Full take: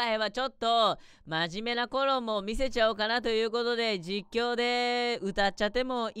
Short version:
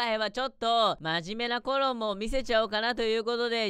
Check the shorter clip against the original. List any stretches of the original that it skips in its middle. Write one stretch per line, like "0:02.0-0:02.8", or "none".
0:01.0-0:01.3